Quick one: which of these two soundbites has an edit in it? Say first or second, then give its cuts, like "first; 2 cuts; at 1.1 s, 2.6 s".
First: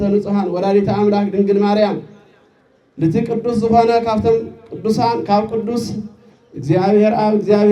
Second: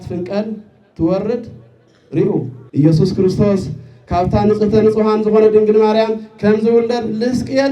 second; 1 cut; at 2.6 s